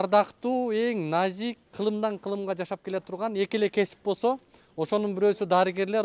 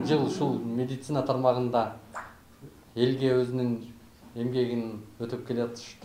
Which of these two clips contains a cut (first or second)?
first